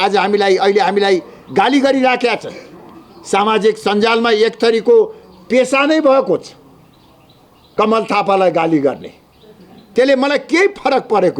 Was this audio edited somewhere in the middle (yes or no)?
no